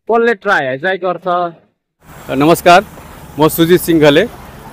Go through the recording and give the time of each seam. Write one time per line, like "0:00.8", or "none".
0:02.2